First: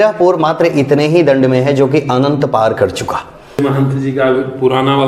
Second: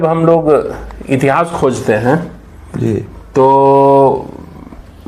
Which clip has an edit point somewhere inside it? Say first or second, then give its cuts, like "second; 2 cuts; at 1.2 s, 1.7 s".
first; 1 cut; at 3.6 s